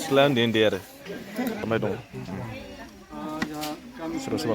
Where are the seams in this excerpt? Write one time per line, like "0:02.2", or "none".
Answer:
0:01.6